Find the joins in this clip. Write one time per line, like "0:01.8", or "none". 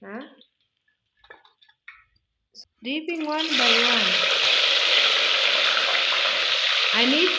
0:02.4